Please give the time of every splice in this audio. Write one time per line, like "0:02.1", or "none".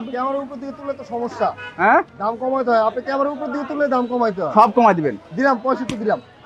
none